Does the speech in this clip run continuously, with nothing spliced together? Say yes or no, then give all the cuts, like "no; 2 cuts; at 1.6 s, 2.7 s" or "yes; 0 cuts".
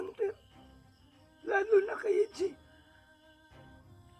no; 1 cut; at 3.0 s